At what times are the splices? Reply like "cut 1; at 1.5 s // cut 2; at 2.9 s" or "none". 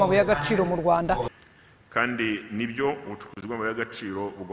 cut 1; at 1.3 s